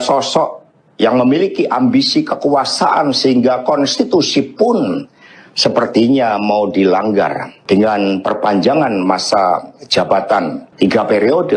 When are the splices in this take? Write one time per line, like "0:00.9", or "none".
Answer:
0:07.5
0:10.6